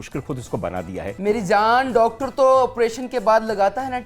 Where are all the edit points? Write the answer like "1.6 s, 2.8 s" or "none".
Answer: 1.1 s